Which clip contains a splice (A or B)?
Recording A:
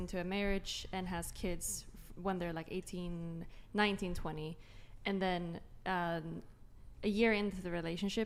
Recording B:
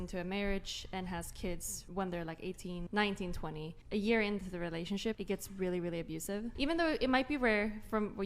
B